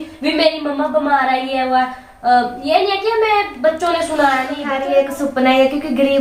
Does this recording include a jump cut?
yes; 1 cut; at 4.8 s

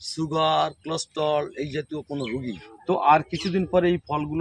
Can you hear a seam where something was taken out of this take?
yes; 1 cut; at 2.6 s

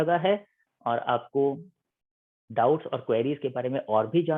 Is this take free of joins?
yes; 0 cuts

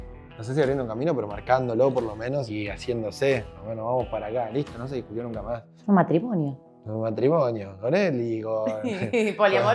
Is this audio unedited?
no; 3 cuts; at 2.5 s, 3.6 s, 5.7 s

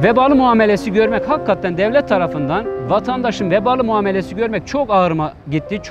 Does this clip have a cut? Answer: no; 0 cuts

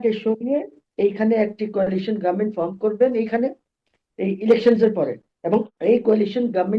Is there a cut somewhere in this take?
yes; 1 cut; at 5.7 s

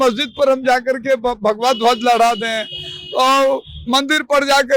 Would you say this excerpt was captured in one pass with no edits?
yes; 0 cuts

